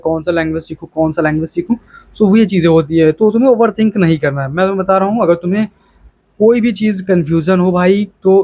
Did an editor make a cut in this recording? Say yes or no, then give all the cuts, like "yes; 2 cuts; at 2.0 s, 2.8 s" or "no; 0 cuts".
no; 0 cuts